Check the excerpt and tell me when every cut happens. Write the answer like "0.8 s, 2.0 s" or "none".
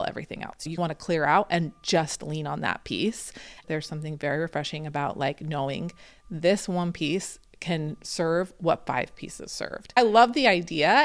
0.7 s, 3.6 s, 10.0 s